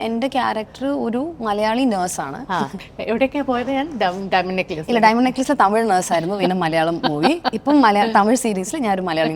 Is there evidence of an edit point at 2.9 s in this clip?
no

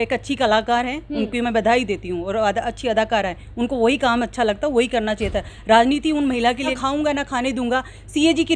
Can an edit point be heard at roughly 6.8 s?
yes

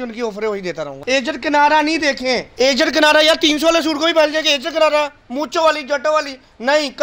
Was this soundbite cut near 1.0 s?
yes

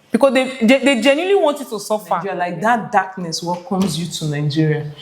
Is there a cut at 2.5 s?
yes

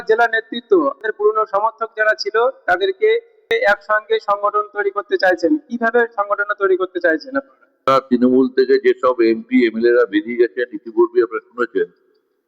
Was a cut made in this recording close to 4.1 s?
no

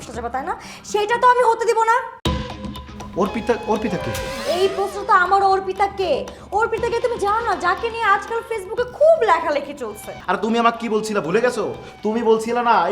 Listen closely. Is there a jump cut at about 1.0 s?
no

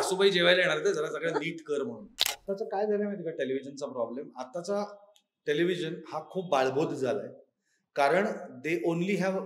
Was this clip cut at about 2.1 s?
yes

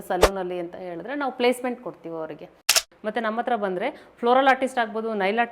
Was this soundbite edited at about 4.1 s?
no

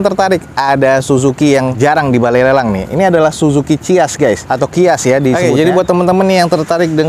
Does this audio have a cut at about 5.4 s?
yes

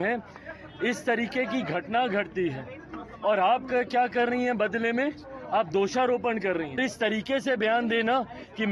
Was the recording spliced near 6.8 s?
yes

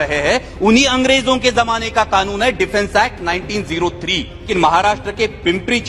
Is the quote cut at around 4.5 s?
yes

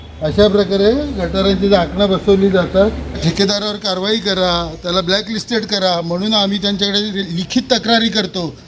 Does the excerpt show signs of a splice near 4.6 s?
no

